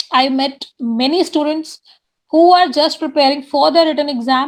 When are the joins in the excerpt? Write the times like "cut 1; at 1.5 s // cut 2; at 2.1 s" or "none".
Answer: none